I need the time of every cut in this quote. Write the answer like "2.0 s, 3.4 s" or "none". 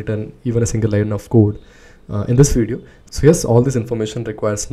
none